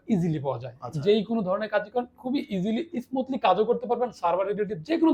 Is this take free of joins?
yes; 0 cuts

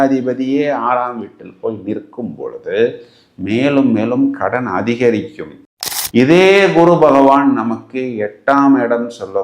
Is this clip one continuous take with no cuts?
no; 1 cut; at 5.9 s

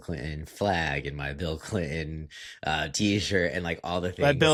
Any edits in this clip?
no; 0 cuts

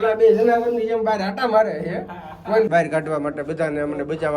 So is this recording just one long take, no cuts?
no; 1 cut; at 2.7 s

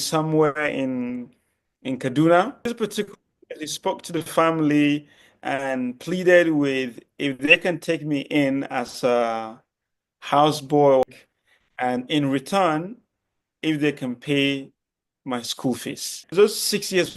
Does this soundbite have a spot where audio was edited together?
yes; 3 cuts; at 2.7 s, 11.0 s, 16.3 s

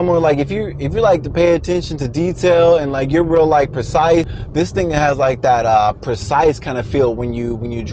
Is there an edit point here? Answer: yes; 1 cut; at 4.4 s

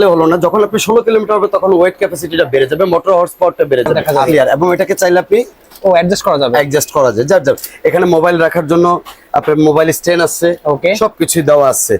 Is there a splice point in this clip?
yes; 1 cut; at 4.1 s

